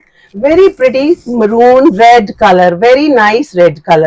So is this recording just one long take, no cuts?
yes; 0 cuts

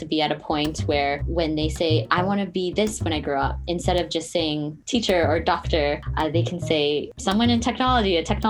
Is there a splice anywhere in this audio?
yes; 4 cuts; at 1.2 s, 4.8 s, 6.1 s, 7.1 s

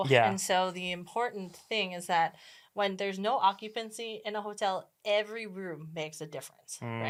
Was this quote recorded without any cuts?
yes; 0 cuts

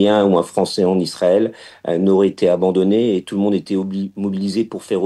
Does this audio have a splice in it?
no; 0 cuts

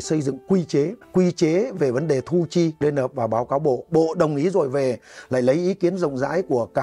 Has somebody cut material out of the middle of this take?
yes; 2 cuts; at 1.0 s, 2.8 s

